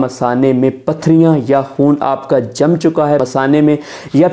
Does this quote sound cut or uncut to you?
cut